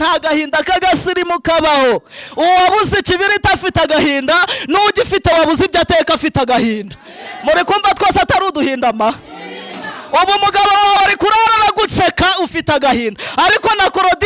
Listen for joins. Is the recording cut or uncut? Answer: uncut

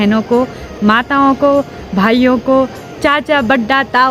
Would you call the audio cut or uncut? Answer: uncut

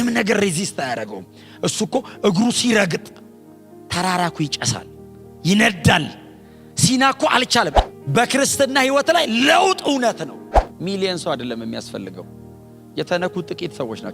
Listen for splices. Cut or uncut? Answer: cut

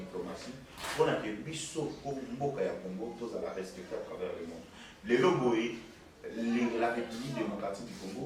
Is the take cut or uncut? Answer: uncut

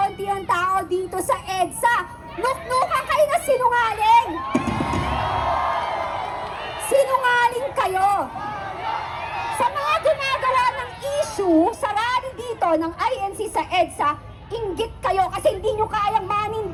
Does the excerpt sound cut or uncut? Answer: uncut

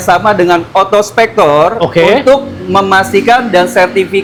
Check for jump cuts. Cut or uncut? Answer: uncut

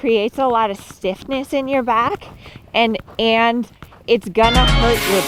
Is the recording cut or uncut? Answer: uncut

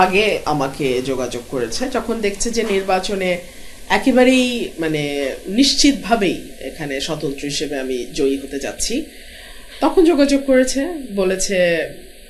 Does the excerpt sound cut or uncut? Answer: uncut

